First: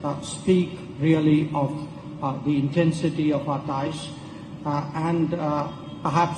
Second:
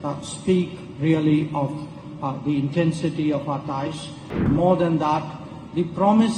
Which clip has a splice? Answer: second; 1 cut; at 4.4 s

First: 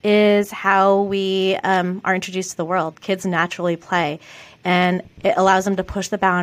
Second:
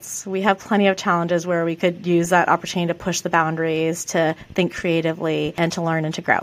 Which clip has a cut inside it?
second; 1 cut; at 5.5 s

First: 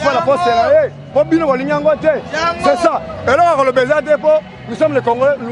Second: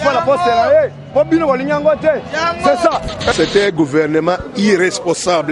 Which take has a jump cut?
second; 1 cut; at 3.3 s

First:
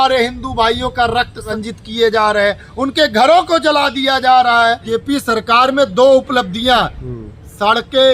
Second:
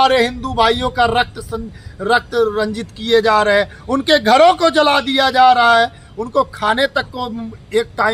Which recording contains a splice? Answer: first; 2 cuts; at 1.5 s, 4.9 s

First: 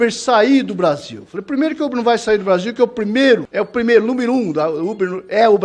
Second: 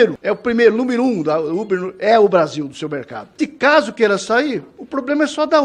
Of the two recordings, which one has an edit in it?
second; 1 cut; at 3.3 s

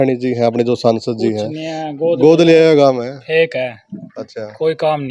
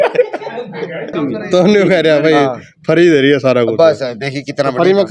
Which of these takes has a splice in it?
second; 1 cut; at 1.1 s

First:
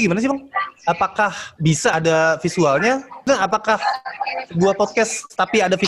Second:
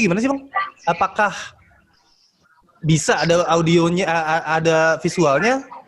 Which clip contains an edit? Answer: first; 2 cuts; at 1.9 s, 3.3 s

